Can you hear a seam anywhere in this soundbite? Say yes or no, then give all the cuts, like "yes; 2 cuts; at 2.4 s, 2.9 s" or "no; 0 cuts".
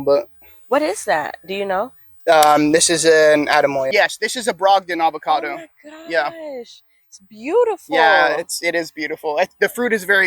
yes; 1 cut; at 3.9 s